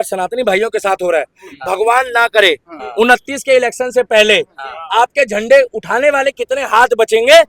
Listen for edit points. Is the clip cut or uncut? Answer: uncut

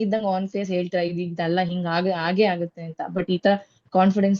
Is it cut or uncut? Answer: uncut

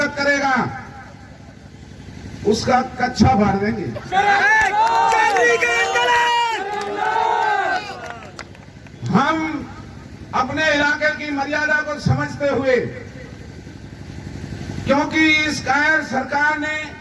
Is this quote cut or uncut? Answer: uncut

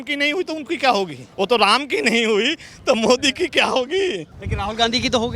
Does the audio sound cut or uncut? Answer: cut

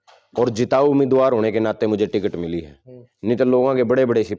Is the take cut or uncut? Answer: uncut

